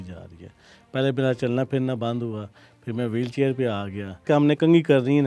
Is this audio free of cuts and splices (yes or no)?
no